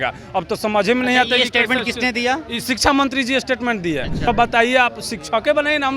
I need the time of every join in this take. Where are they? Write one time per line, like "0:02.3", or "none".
0:04.3